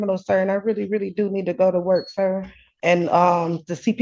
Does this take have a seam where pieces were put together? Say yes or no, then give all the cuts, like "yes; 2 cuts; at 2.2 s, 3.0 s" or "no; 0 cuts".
yes; 1 cut; at 2.8 s